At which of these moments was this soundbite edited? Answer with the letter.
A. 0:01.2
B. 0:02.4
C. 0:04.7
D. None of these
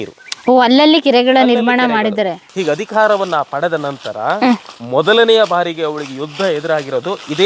B